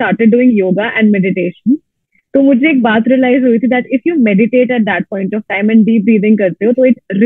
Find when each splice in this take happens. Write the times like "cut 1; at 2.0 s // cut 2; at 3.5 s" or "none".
none